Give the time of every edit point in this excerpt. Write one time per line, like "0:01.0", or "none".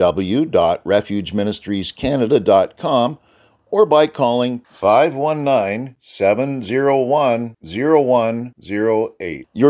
none